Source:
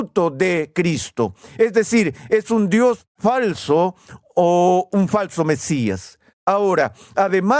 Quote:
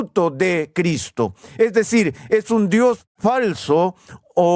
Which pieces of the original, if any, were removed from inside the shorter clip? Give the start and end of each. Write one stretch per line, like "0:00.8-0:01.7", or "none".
none